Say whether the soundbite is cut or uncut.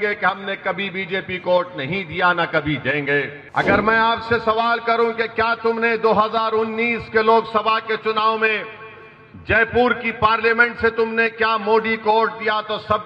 cut